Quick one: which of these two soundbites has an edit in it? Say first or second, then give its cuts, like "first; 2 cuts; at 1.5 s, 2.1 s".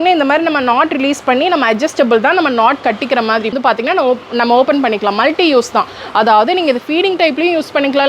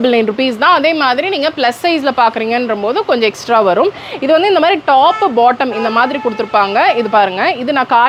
first; 1 cut; at 3.5 s